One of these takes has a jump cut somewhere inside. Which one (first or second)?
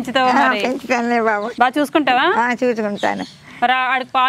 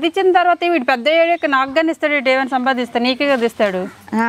first